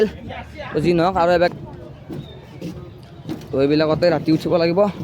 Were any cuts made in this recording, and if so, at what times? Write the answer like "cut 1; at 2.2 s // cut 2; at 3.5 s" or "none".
cut 1; at 1.5 s

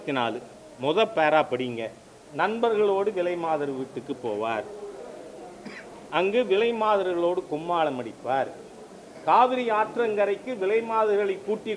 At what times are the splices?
none

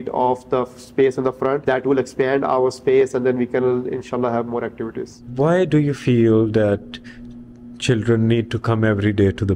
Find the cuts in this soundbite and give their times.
none

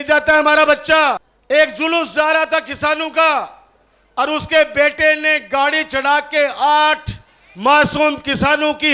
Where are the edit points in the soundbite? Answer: cut 1; at 1.3 s

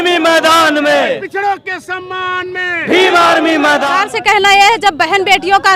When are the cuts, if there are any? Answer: cut 1; at 3.9 s

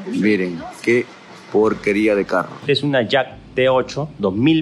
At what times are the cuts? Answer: cut 1; at 2.5 s

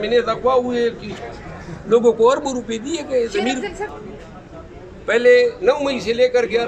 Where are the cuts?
cut 1; at 3.9 s

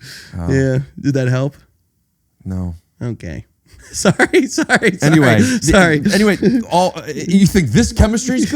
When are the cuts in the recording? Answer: cut 1; at 3.9 s

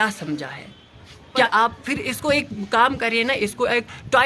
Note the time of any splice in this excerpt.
cut 1; at 1.5 s

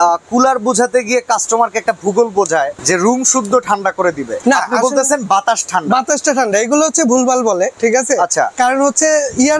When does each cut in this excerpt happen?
cut 1; at 2.8 s // cut 2; at 4.3 s // cut 3; at 7.7 s

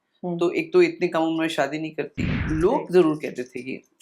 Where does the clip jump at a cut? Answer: cut 1; at 2.3 s

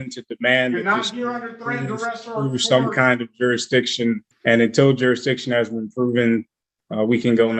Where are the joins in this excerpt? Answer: cut 1; at 4.3 s

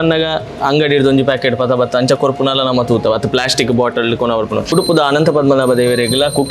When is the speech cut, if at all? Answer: cut 1; at 4.7 s

